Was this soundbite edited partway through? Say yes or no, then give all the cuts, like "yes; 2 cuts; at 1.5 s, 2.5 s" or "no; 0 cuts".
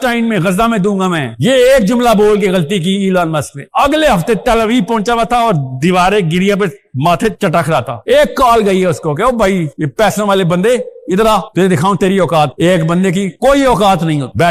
no; 0 cuts